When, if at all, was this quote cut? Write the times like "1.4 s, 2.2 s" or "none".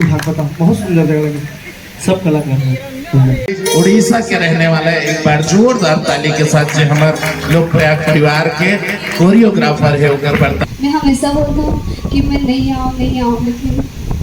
3.6 s, 10.6 s